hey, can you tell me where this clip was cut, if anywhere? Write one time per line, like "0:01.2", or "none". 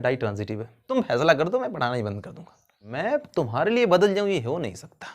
0:00.9
0:02.9

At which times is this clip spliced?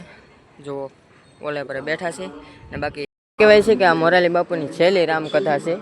0:03.1

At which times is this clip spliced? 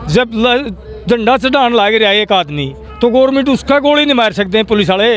none

